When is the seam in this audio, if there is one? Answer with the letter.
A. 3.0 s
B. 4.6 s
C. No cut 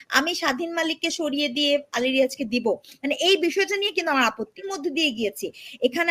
B